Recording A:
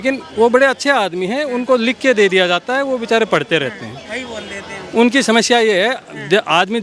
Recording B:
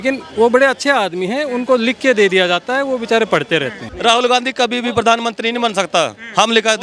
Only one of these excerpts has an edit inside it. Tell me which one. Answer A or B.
B